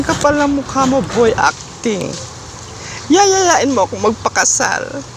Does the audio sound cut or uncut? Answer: uncut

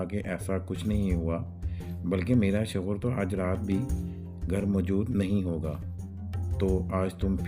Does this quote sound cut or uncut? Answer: uncut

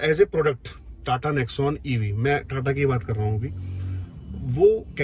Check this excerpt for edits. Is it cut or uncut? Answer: uncut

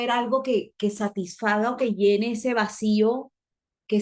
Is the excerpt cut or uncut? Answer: uncut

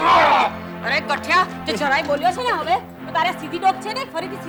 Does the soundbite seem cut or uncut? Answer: uncut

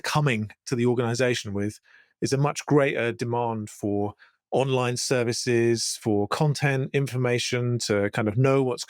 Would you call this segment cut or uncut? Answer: uncut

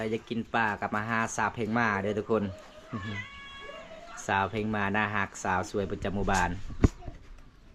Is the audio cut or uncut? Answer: uncut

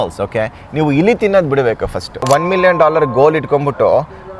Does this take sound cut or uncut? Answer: cut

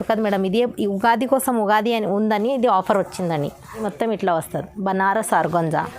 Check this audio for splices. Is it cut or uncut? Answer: cut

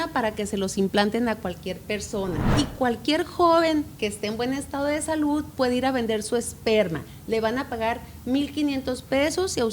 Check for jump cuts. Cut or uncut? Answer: cut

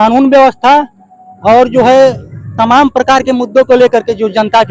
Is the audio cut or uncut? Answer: uncut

